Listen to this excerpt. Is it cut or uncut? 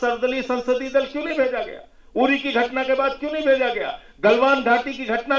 uncut